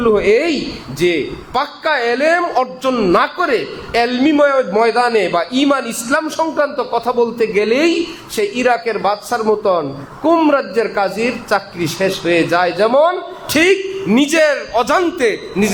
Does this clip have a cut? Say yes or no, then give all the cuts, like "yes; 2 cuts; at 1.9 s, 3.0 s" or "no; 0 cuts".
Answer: no; 0 cuts